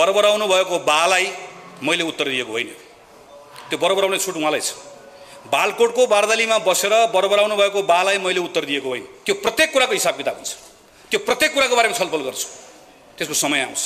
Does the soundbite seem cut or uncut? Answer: cut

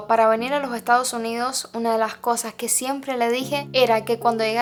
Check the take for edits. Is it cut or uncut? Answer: uncut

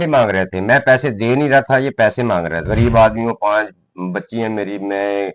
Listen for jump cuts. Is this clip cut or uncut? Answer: cut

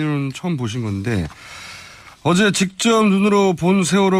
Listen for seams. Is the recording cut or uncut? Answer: cut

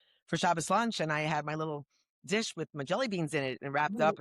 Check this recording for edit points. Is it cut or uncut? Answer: uncut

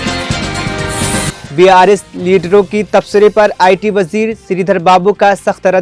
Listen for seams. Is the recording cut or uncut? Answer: cut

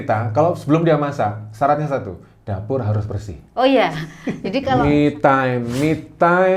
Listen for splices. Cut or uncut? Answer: cut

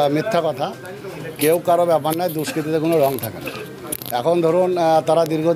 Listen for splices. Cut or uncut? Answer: uncut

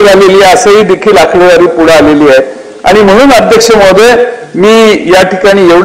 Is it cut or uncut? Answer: uncut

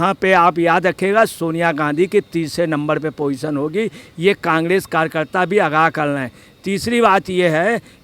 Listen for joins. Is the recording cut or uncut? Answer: uncut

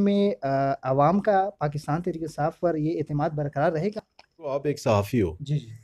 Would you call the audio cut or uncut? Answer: cut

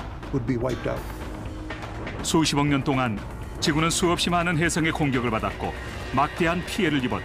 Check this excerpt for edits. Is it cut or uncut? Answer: cut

